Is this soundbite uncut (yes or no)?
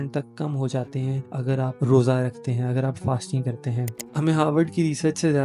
no